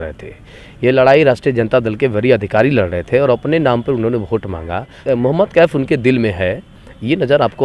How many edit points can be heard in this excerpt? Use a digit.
1